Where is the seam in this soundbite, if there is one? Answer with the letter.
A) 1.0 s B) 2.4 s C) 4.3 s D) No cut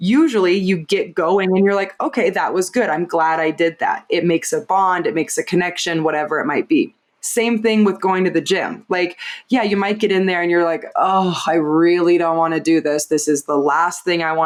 D